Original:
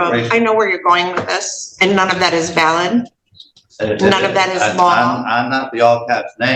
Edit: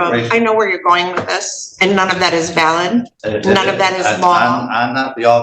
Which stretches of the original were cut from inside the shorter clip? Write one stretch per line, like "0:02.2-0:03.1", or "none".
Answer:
0:03.2-0:03.7